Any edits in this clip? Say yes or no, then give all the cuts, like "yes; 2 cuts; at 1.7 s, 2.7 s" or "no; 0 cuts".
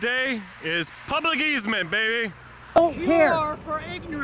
yes; 1 cut; at 2.8 s